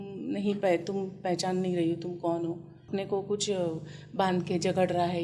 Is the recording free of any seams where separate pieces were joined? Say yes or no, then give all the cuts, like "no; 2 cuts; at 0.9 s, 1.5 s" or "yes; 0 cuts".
no; 1 cut; at 2.8 s